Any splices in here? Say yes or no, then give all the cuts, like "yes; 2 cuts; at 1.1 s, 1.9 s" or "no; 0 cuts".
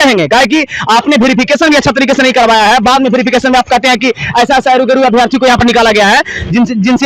no; 0 cuts